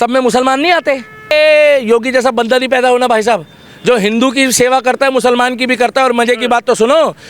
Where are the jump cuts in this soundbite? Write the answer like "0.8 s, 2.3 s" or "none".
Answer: 1.3 s